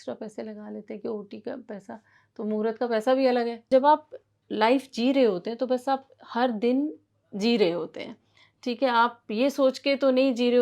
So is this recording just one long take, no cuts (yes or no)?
no